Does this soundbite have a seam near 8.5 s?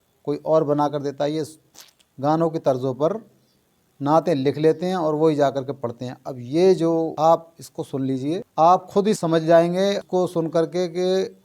yes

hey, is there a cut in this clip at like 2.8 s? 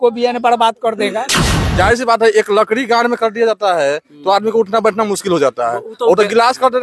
no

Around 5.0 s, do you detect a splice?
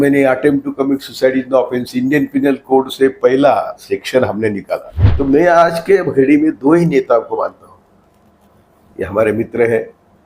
yes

